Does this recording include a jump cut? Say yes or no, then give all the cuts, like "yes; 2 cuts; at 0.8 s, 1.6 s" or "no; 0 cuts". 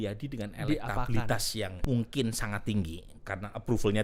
yes; 1 cut; at 1.8 s